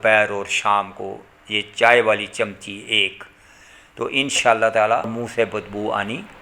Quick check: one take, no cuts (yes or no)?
no